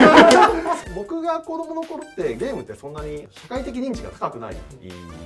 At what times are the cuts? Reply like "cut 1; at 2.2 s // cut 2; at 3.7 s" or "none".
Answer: cut 1; at 0.8 s // cut 2; at 3.3 s